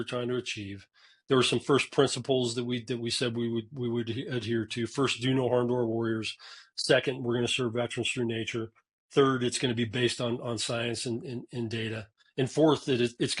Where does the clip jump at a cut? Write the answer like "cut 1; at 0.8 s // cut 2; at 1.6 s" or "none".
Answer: none